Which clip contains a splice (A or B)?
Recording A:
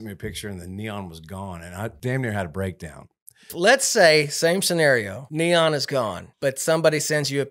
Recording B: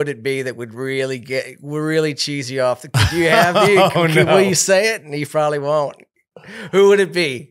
A